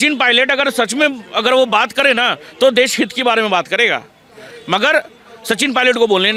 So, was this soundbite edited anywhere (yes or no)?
no